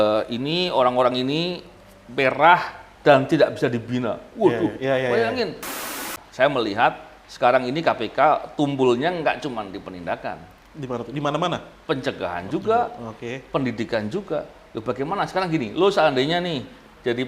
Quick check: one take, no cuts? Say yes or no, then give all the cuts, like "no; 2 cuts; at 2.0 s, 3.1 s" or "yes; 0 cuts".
no; 1 cut; at 5.8 s